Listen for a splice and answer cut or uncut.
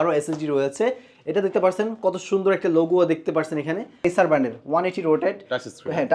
cut